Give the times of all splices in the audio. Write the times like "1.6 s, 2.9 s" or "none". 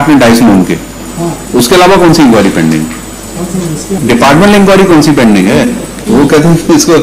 4.0 s, 5.9 s